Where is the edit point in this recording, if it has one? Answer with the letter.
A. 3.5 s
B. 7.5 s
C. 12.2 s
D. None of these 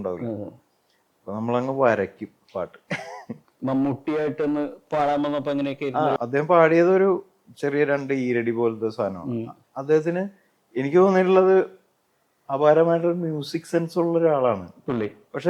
A